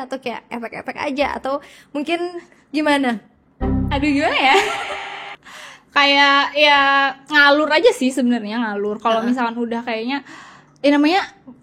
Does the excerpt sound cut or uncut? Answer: uncut